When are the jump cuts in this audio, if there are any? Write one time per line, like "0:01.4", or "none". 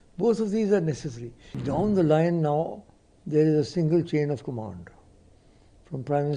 0:01.5